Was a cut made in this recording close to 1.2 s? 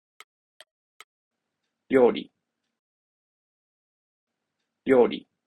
yes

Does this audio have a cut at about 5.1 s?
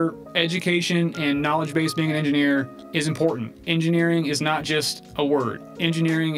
no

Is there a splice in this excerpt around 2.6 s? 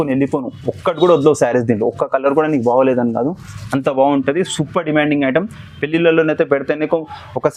no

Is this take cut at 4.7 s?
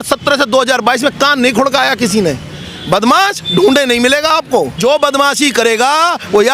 yes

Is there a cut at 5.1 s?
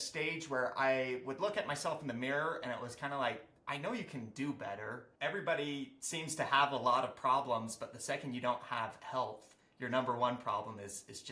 yes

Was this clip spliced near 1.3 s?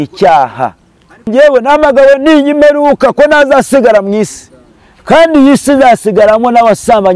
yes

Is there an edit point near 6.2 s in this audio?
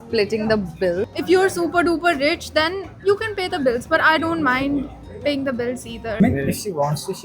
yes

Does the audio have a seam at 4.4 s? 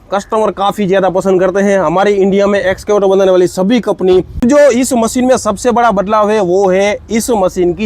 yes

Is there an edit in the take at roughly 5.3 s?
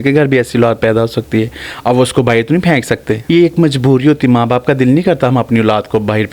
no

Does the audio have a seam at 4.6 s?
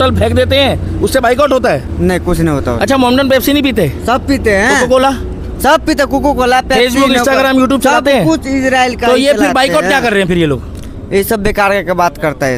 no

